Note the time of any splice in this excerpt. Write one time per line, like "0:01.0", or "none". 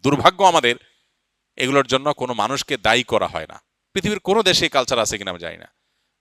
none